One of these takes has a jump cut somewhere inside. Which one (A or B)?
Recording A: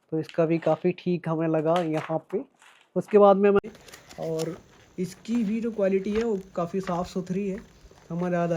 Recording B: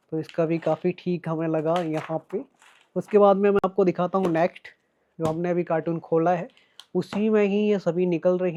A